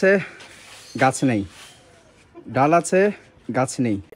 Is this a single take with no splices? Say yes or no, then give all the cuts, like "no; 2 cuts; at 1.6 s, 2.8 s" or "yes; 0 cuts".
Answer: yes; 0 cuts